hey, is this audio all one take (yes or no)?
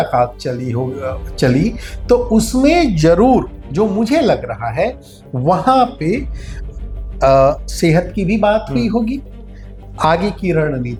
yes